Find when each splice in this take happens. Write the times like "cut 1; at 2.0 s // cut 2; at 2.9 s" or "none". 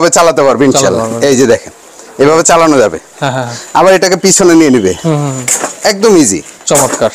none